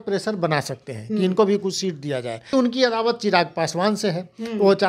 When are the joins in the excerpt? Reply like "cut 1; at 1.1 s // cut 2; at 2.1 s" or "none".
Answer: cut 1; at 2.5 s

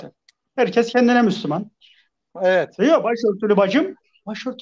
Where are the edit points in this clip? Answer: cut 1; at 2.2 s

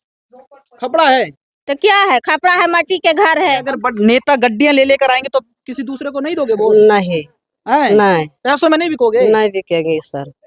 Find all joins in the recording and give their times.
cut 1; at 3.7 s

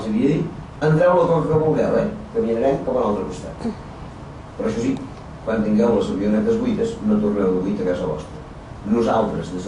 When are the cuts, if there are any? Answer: cut 1; at 3.5 s

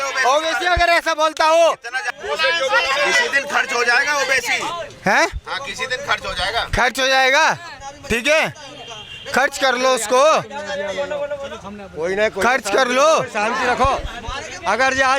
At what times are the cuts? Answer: cut 1; at 2.1 s

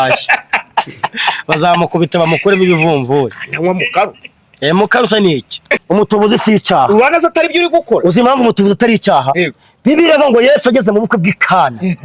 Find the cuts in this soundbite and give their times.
cut 1; at 5.7 s

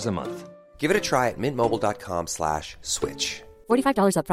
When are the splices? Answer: none

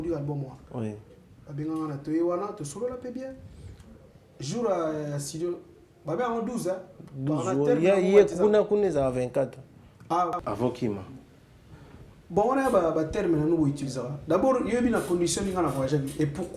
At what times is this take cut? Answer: cut 1; at 10.4 s

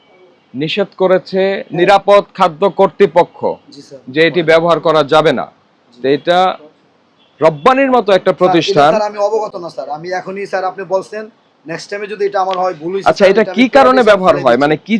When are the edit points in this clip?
none

